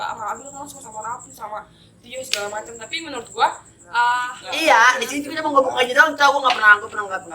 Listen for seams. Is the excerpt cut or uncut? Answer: cut